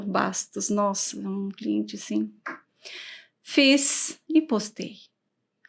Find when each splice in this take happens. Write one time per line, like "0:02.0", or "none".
none